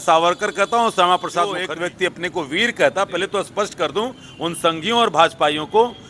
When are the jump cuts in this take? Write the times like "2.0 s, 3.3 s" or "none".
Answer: 1.7 s